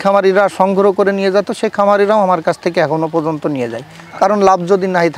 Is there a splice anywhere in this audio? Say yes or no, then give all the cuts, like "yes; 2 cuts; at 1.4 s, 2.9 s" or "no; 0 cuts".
no; 0 cuts